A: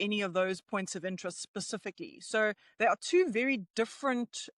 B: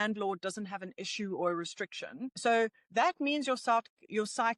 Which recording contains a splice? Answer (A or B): B